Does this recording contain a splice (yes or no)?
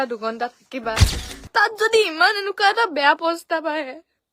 yes